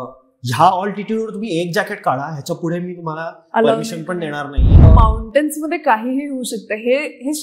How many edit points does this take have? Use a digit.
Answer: 1